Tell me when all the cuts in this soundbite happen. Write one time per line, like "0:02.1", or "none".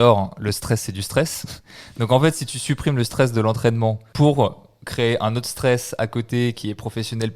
0:04.0